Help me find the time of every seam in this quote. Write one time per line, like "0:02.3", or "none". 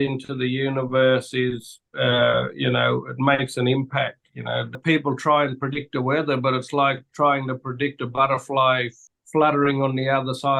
0:04.7
0:09.0